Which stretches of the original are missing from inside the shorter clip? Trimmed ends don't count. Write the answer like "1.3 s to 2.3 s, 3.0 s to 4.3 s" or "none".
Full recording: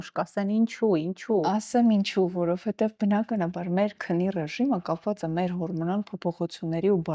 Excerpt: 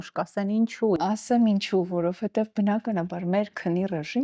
1.0 s to 1.4 s